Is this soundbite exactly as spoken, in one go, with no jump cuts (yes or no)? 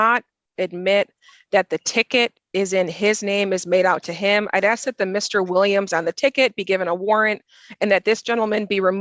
yes